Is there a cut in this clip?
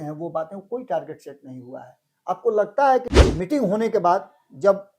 yes; 1 cut; at 3.2 s

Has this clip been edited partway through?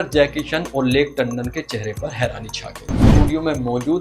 yes; 1 cut; at 3.0 s

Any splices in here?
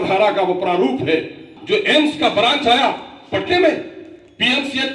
yes; 1 cut; at 1.5 s

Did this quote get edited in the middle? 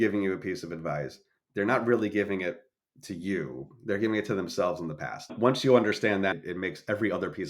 yes; 1 cut; at 5.2 s

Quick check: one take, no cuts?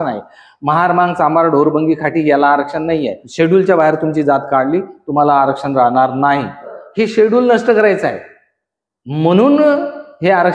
no; 2 cuts; at 3.2 s, 6.7 s

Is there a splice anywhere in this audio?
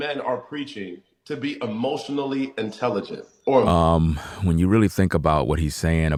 no; 0 cuts

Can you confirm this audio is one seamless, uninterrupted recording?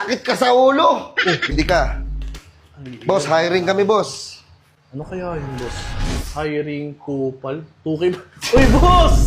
no; 1 cut; at 1.5 s

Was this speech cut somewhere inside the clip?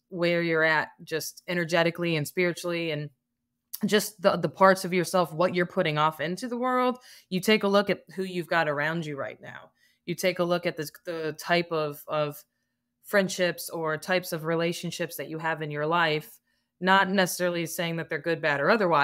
no; 0 cuts

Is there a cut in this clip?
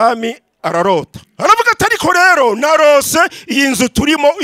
yes; 1 cut; at 1.2 s

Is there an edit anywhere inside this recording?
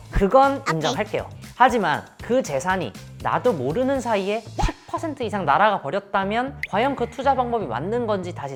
no; 0 cuts

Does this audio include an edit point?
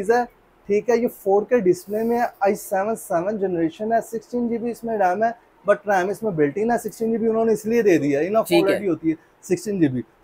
no; 0 cuts

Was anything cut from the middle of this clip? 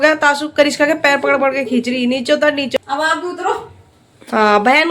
yes; 1 cut; at 2.8 s

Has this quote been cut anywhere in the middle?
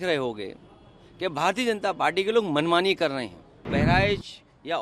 yes; 1 cut; at 3.7 s

